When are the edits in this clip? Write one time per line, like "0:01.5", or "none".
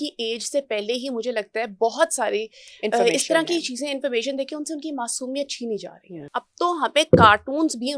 0:06.4

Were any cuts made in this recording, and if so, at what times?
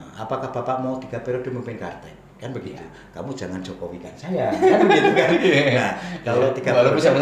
none

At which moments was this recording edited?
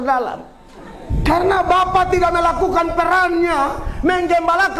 0:01.1

